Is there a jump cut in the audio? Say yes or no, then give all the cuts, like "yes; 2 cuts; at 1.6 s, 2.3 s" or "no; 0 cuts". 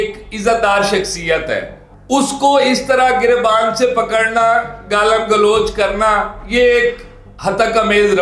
no; 0 cuts